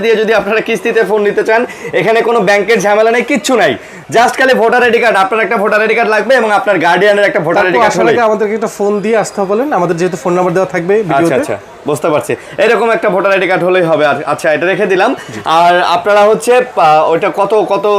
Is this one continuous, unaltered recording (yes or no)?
yes